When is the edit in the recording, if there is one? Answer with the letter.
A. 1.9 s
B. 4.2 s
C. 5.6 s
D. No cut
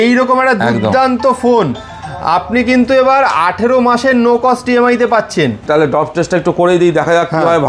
C